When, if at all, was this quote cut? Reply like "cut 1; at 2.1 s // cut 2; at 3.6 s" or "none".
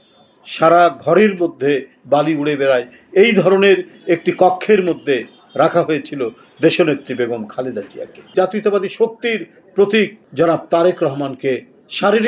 cut 1; at 8.3 s // cut 2; at 10.2 s